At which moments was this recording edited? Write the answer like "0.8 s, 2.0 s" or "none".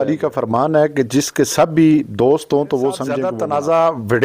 3.3 s